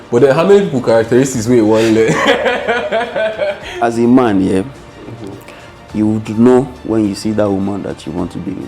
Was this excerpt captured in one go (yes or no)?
no